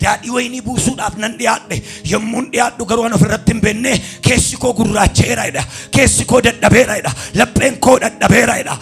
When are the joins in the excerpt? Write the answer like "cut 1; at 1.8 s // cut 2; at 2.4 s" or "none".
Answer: none